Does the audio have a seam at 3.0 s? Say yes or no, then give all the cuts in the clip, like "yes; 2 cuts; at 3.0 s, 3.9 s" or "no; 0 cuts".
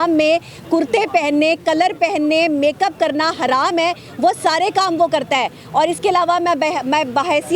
no; 0 cuts